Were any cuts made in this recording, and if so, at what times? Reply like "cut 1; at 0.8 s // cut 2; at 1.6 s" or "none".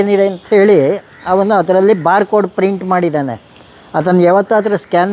none

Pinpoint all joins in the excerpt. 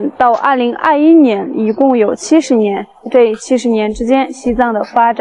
none

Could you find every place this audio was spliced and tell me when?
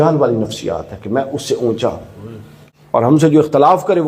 cut 1; at 3.0 s

